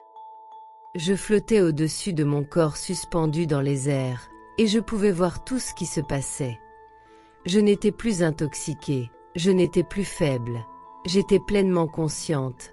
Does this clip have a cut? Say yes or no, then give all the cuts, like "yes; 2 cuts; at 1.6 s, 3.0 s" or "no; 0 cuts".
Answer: yes; 1 cut; at 0.9 s